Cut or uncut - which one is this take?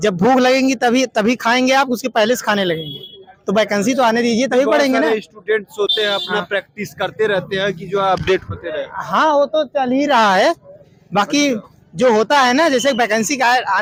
uncut